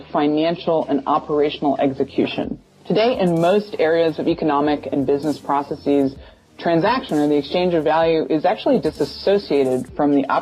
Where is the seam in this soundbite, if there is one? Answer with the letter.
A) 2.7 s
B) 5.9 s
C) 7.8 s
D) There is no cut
A